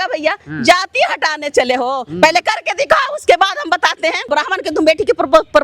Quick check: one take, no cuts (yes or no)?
no